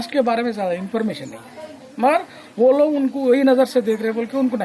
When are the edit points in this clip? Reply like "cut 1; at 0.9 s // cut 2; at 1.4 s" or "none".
none